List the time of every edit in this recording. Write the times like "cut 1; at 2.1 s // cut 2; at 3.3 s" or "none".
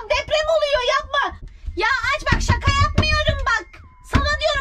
cut 1; at 1.4 s